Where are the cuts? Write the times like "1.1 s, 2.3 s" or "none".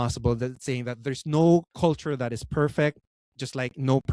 1.7 s

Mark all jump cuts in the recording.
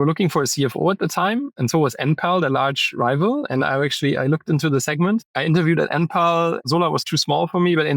1.5 s, 5.3 s, 6.6 s

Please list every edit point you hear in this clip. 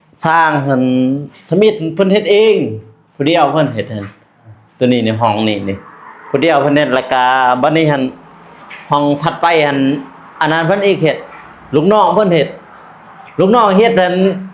none

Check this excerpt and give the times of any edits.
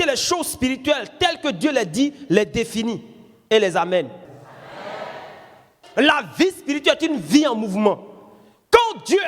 4.4 s, 5.8 s

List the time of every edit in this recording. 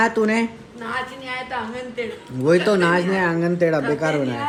none

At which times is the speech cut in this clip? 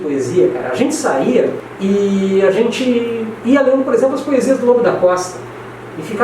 1.7 s

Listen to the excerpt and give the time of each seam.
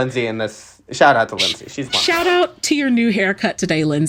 none

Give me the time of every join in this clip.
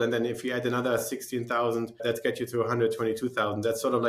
2.0 s

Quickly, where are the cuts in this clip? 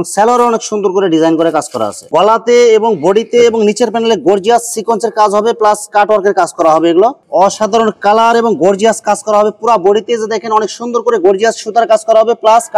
2.0 s, 7.2 s

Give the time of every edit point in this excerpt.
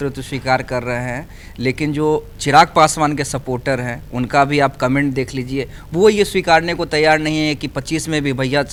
none

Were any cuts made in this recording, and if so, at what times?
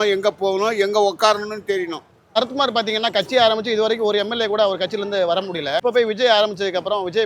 2.4 s, 5.8 s

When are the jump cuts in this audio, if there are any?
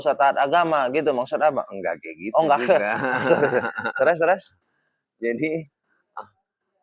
none

